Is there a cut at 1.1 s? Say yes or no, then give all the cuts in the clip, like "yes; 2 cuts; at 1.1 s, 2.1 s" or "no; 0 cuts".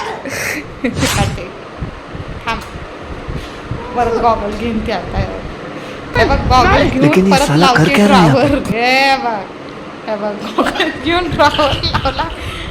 yes; 1 cut; at 1.1 s